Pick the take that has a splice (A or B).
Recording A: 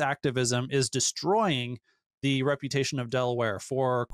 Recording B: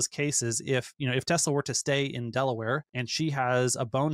B